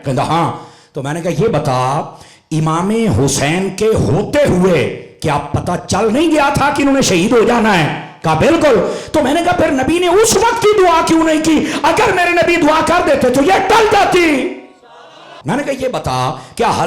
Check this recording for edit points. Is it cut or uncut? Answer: cut